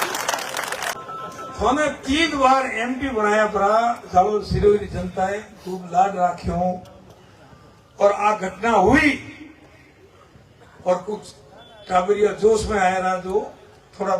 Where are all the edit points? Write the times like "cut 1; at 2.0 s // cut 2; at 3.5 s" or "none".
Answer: cut 1; at 1.0 s